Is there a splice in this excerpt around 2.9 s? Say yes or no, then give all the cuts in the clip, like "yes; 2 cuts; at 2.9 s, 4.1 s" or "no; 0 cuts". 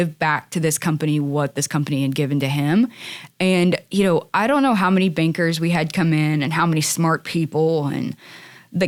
no; 0 cuts